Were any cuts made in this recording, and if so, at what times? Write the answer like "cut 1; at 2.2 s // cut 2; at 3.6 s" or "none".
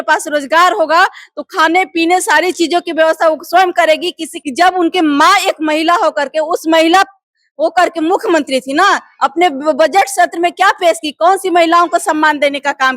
cut 1; at 4.3 s